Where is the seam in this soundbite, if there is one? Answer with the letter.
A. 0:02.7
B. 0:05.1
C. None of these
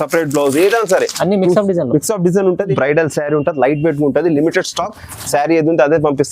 A